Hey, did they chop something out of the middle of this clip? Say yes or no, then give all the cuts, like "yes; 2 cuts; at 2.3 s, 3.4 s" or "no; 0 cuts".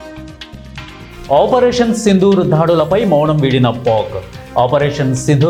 no; 0 cuts